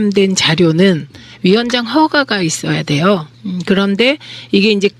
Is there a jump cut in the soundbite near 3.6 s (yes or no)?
no